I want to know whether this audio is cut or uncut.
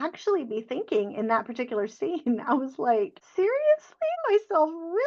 cut